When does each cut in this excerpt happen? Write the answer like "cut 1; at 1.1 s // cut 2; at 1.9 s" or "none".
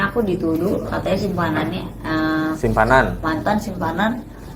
none